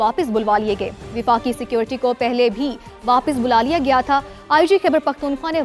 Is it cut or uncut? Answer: uncut